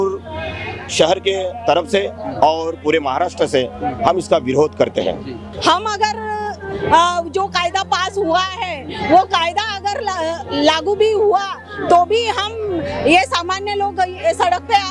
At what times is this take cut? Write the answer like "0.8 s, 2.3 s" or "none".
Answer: 5.5 s